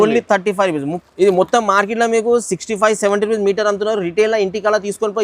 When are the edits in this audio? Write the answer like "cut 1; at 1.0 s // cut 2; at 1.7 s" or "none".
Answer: cut 1; at 0.9 s